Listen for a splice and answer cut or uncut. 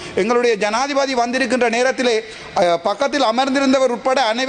uncut